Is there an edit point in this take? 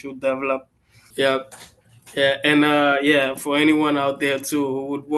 yes; 1 cut; at 1.0 s

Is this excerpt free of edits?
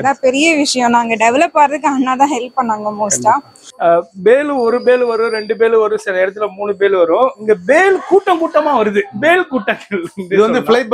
no; 1 cut; at 3.6 s

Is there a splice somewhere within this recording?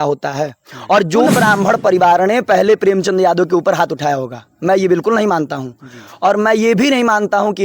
yes; 1 cut; at 1.3 s

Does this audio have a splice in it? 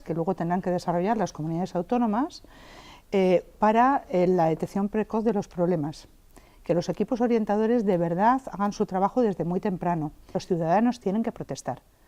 yes; 1 cut; at 10.3 s

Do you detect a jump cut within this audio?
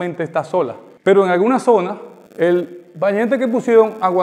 no; 0 cuts

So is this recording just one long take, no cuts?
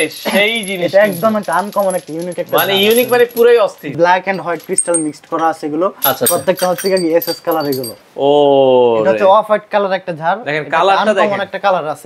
no; 2 cuts; at 3.9 s, 7.9 s

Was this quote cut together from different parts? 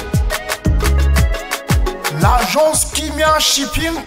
yes; 1 cut; at 2.0 s

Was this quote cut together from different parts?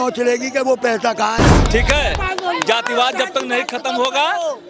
yes; 1 cut; at 1.6 s

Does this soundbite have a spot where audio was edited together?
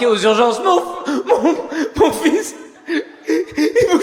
no; 0 cuts

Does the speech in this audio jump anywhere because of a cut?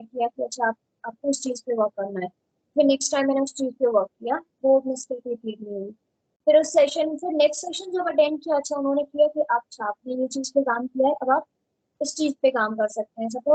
no; 0 cuts

